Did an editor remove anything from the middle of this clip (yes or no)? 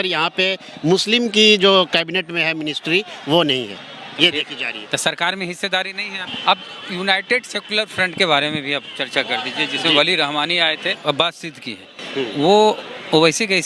yes